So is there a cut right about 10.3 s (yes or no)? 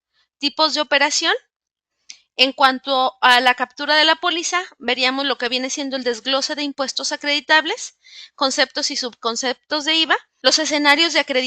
yes